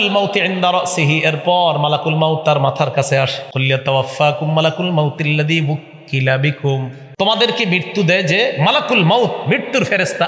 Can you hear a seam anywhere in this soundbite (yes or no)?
yes